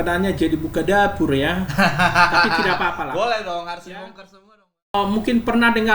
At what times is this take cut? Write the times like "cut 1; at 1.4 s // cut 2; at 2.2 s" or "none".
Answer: cut 1; at 4.9 s